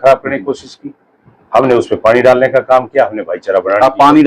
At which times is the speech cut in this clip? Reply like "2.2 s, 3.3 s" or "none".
none